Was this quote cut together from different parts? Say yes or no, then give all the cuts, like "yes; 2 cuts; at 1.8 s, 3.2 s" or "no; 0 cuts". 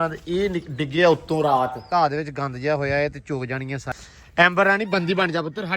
yes; 2 cuts; at 1.8 s, 3.9 s